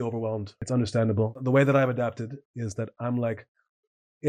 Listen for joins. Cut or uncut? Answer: cut